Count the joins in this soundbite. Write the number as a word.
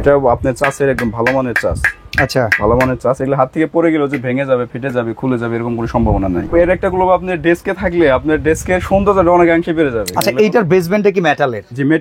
two